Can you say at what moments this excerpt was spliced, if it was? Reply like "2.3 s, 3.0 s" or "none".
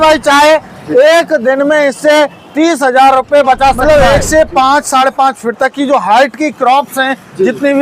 3.8 s